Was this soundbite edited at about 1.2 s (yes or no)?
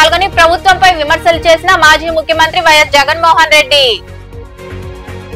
no